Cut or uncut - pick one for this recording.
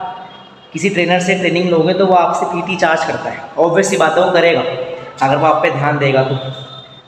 uncut